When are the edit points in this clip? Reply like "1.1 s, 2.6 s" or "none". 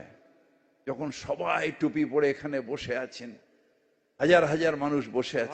none